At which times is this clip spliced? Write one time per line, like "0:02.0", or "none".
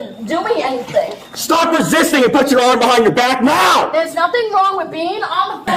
none